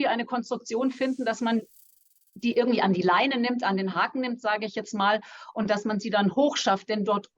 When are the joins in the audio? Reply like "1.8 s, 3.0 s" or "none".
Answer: none